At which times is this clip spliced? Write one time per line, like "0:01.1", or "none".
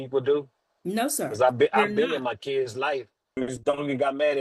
0:03.3